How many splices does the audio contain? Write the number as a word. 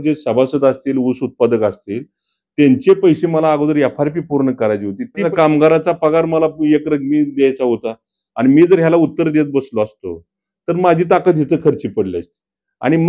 one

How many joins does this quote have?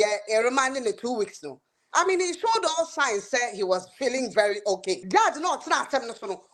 one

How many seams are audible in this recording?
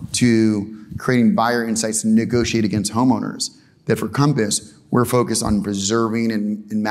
zero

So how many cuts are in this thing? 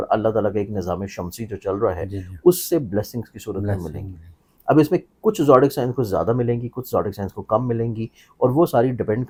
zero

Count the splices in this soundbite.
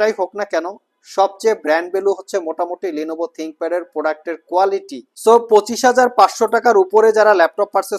one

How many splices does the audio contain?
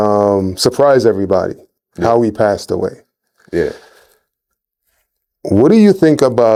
zero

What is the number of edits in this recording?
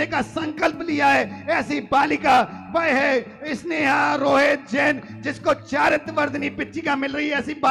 zero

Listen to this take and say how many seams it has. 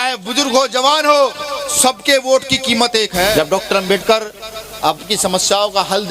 one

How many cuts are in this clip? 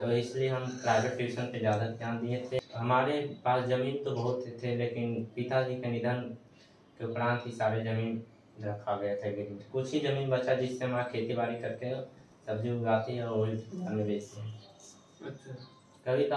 one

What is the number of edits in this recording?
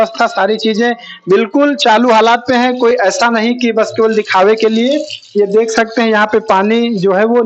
zero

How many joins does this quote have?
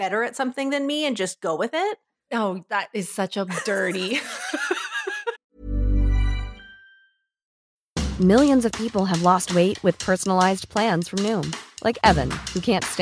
one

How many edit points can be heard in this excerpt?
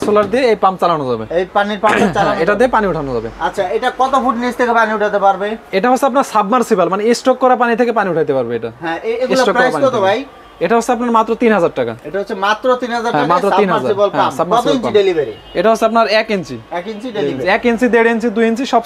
zero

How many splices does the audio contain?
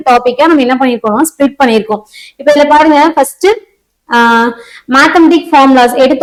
zero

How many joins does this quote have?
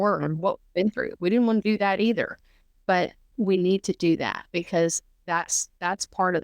one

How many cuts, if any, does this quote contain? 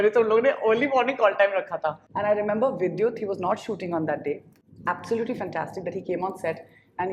one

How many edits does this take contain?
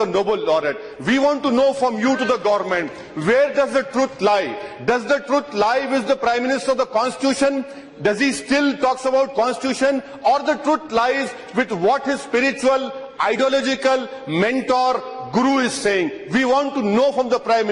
zero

